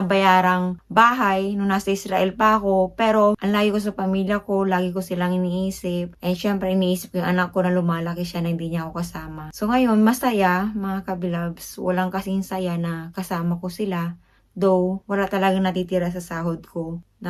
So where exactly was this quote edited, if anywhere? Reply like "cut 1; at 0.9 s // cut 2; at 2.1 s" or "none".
none

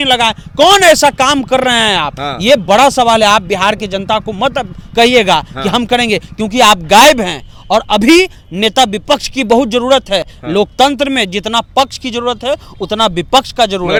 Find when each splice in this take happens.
none

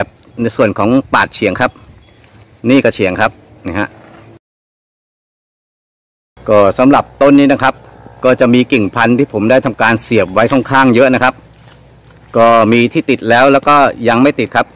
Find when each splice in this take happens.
none

